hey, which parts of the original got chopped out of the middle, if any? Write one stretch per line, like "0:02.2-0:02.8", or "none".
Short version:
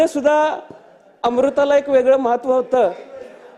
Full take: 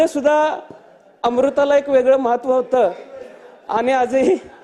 none